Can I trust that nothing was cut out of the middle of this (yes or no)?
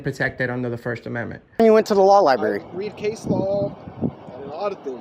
no